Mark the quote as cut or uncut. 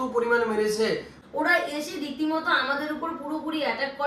cut